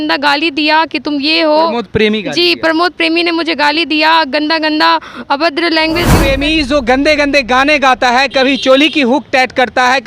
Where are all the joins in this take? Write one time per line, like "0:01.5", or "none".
0:06.2